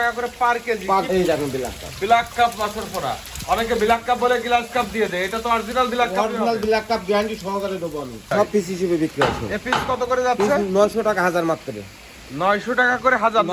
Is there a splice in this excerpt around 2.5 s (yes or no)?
no